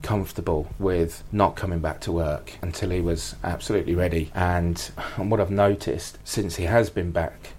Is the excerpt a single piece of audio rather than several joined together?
yes; 0 cuts

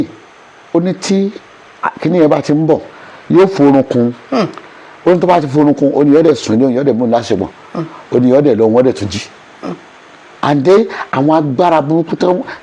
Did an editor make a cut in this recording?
no; 0 cuts

